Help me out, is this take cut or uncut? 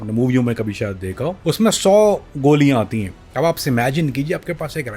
cut